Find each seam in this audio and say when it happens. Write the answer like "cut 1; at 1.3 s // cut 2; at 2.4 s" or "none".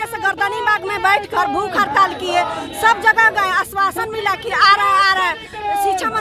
none